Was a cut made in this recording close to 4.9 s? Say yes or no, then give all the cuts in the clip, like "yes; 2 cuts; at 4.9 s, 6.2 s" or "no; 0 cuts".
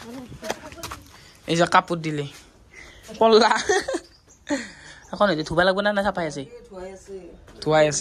no; 1 cut; at 1.2 s